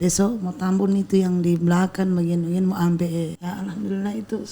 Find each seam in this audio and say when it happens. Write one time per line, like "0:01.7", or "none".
0:03.4